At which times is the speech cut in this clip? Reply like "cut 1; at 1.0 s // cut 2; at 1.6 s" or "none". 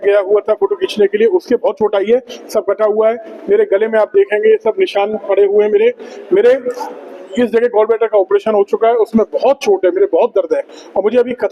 none